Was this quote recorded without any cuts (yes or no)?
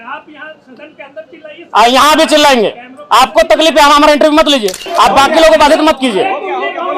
no